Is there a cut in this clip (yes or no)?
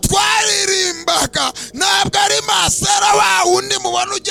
no